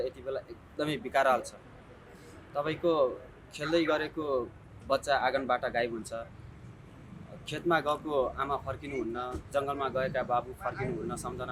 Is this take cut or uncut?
uncut